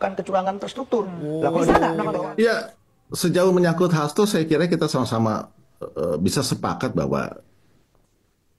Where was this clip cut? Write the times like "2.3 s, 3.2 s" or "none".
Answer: 2.2 s